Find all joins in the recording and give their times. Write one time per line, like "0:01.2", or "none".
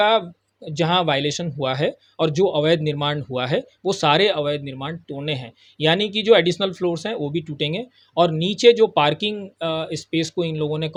none

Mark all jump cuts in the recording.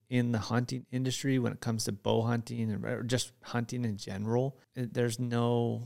0:04.6

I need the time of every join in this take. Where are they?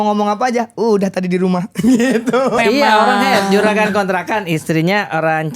0:02.6

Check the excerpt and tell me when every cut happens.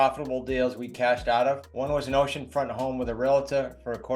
0:01.7

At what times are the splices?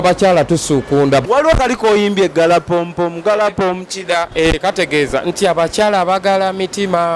0:01.2

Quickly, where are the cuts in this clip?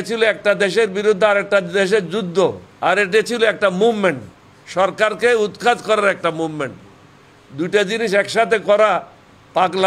0:02.7

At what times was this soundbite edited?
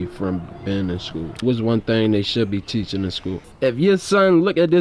0:01.3
0:03.5

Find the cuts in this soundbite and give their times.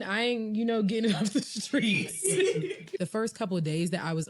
0:02.9

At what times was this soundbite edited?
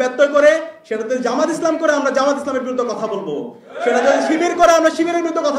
none

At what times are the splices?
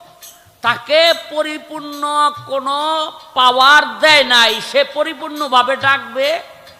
none

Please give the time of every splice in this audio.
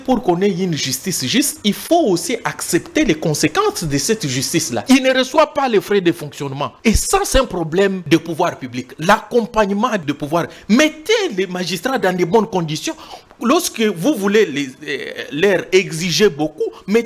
0:04.7
0:06.7
0:08.0
0:10.0

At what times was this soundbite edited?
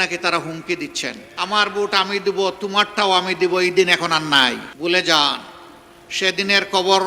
0:01.2
0:04.7

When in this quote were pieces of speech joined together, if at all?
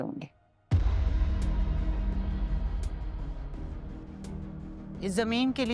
none

